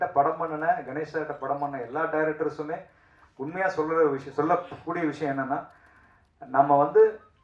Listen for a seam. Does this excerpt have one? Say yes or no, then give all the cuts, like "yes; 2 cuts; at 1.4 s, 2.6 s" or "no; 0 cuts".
no; 0 cuts